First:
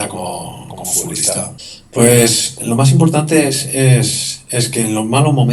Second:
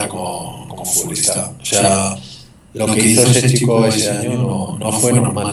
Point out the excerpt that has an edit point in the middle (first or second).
first